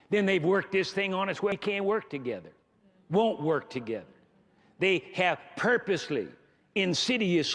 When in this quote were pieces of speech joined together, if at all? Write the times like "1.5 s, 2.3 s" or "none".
1.5 s